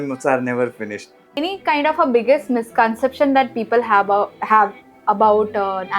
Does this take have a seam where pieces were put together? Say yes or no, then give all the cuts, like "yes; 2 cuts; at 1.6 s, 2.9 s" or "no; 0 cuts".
yes; 1 cut; at 1.4 s